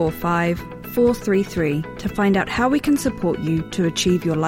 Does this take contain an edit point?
no; 0 cuts

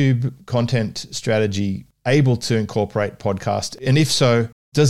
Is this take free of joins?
yes; 0 cuts

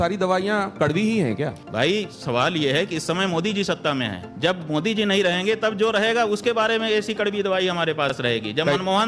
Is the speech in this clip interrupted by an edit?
yes; 2 cuts; at 1.6 s, 4.2 s

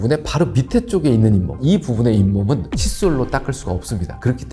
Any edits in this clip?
yes; 1 cut; at 1.6 s

